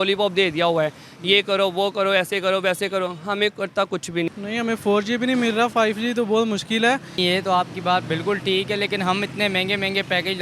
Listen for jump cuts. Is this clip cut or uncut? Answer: cut